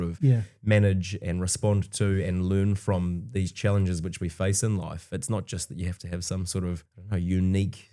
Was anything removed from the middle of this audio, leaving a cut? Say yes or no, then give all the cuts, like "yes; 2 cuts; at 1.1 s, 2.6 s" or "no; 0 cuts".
yes; 1 cut; at 6.9 s